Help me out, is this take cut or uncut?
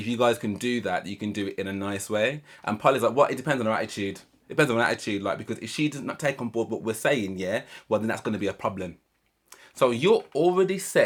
uncut